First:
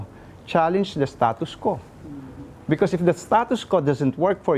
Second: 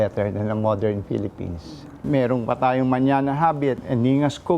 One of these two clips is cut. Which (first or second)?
second